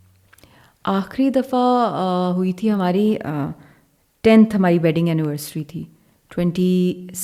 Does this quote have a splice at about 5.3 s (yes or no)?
no